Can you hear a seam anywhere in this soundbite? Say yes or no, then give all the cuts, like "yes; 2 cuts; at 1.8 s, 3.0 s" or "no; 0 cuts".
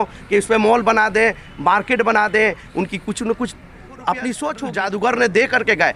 yes; 1 cut; at 4.6 s